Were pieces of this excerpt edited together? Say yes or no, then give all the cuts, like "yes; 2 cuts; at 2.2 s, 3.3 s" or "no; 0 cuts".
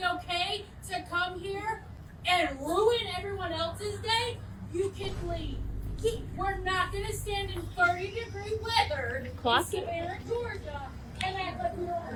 no; 0 cuts